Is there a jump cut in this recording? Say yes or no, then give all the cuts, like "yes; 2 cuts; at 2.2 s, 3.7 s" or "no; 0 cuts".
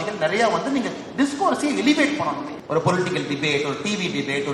yes; 1 cut; at 2.5 s